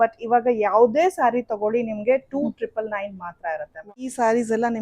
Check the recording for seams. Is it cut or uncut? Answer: cut